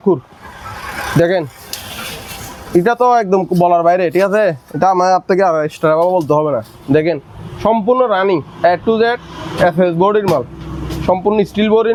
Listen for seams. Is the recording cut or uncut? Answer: uncut